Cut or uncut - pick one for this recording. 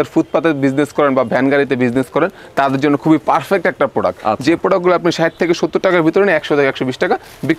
uncut